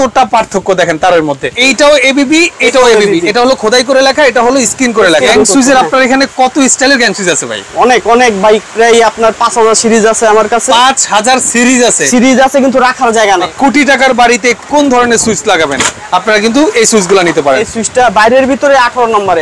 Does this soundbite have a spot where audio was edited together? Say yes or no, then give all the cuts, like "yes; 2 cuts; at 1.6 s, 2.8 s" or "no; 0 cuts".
yes; 4 cuts; at 1.5 s, 5.3 s, 13.5 s, 17.7 s